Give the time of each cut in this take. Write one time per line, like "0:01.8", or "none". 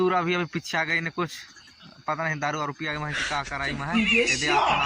0:03.9